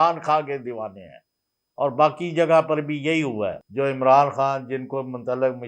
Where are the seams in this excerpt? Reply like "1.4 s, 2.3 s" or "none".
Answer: 3.6 s